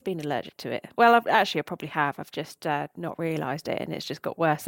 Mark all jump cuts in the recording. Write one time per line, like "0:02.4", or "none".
none